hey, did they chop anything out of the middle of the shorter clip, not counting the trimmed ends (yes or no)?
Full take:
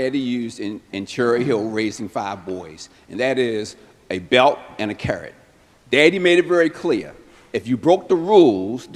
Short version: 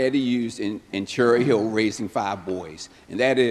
no